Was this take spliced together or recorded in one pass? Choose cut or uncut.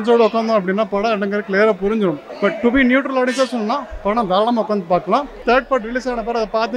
cut